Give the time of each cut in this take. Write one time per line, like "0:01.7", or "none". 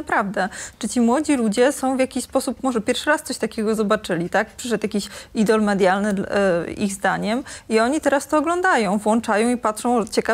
none